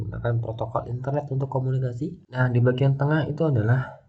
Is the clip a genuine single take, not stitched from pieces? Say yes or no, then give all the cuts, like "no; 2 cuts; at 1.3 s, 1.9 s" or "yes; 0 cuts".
no; 1 cut; at 2.2 s